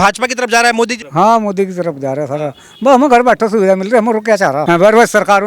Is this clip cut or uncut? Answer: cut